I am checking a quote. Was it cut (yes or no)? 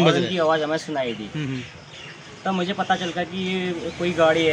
no